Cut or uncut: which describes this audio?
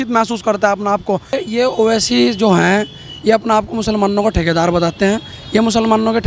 cut